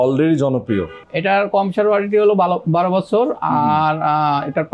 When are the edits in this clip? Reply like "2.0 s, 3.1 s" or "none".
1.0 s